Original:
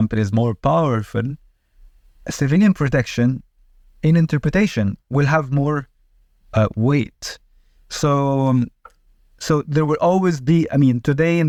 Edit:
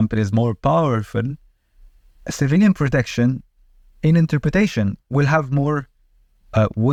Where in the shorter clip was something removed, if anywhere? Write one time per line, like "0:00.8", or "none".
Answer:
none